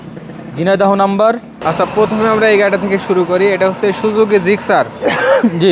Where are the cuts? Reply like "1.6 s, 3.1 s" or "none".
1.5 s